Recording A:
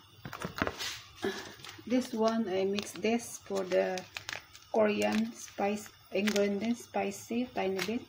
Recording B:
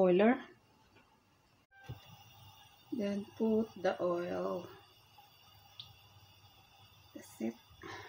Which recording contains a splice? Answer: B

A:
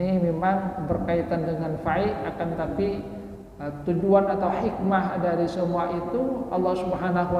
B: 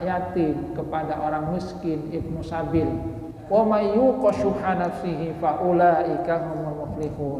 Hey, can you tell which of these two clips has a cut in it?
B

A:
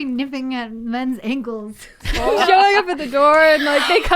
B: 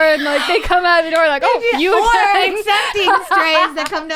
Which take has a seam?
A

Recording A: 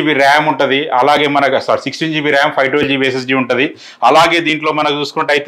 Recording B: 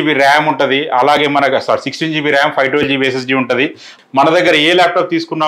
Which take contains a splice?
B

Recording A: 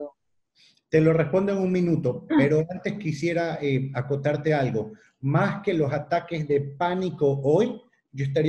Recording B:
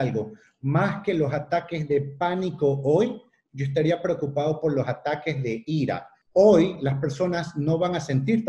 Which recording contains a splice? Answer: B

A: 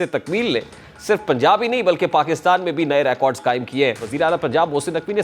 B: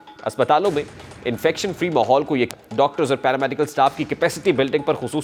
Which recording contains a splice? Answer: A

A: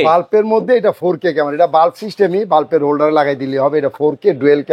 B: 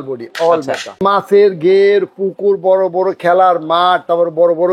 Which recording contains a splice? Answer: B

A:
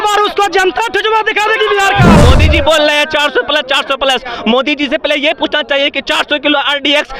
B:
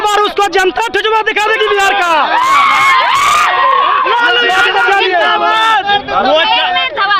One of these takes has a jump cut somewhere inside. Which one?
A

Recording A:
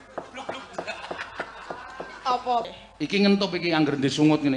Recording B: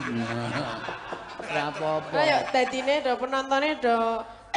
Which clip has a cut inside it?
A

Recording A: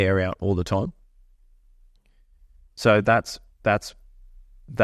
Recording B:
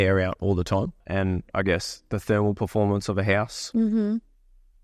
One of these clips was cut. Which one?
B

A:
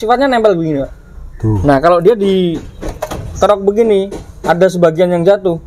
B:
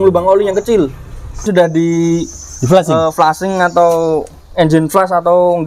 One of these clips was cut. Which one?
B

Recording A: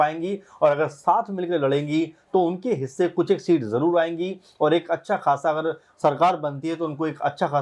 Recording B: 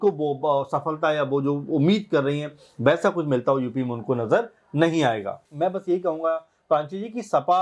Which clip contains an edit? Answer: B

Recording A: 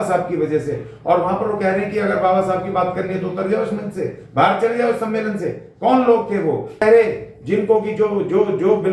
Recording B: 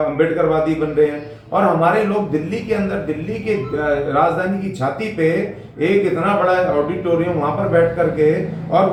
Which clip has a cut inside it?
A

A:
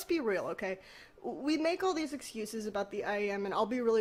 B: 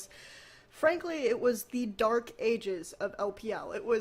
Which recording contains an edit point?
B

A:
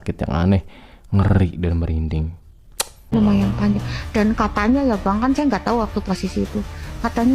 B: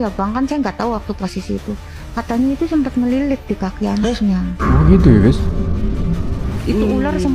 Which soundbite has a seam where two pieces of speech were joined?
A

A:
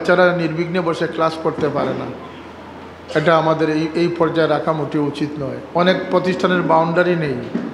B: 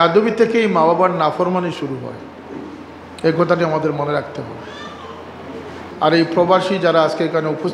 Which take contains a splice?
B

